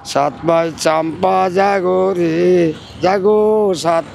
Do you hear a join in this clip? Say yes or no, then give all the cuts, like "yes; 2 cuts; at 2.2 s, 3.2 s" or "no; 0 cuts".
no; 0 cuts